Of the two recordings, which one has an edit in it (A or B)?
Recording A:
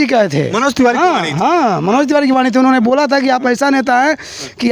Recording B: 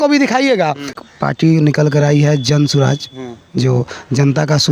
B